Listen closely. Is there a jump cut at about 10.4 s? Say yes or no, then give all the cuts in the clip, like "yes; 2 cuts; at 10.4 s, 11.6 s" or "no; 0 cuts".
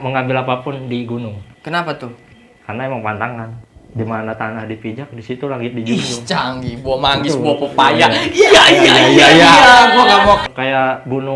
yes; 1 cut; at 10.4 s